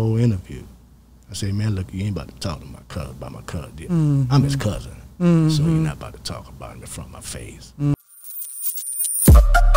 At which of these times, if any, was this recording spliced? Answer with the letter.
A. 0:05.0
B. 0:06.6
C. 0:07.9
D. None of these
C